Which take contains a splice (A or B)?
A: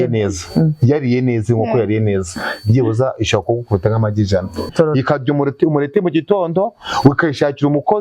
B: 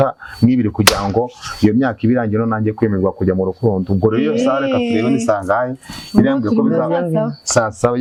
A